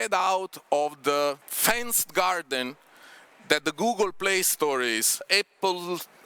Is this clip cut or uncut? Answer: cut